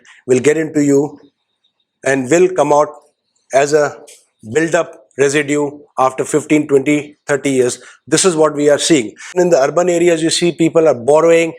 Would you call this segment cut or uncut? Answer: cut